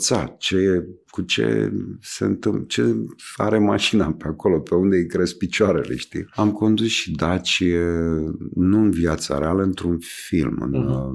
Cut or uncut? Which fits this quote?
cut